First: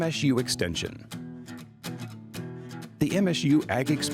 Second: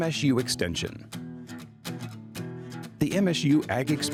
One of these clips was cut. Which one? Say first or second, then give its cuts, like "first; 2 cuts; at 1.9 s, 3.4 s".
first; 2 cuts; at 1.1 s, 2.8 s